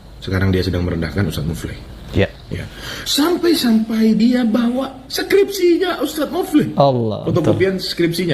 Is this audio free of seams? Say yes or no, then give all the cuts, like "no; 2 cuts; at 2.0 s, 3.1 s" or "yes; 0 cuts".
no; 1 cut; at 2.4 s